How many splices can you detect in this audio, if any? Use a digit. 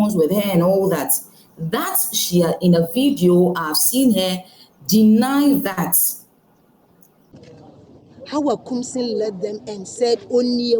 1